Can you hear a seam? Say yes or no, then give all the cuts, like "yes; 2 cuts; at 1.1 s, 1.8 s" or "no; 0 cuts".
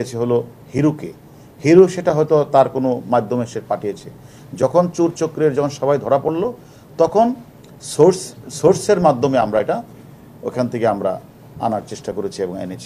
no; 0 cuts